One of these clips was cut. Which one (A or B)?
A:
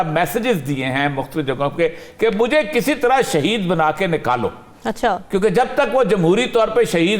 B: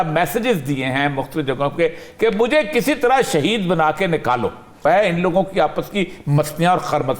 B